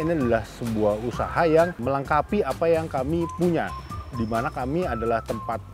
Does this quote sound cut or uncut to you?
cut